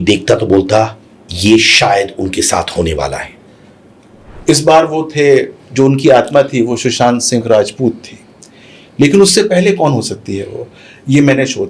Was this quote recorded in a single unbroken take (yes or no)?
no